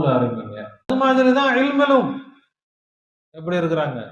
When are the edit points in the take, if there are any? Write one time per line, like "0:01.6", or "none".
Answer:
0:00.9